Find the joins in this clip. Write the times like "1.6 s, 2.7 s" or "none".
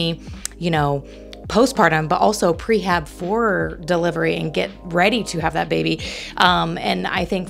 none